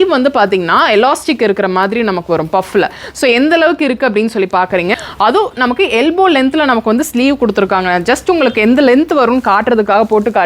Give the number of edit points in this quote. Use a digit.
1